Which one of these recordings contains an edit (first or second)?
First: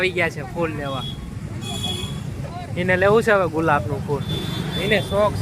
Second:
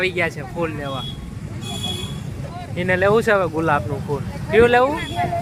first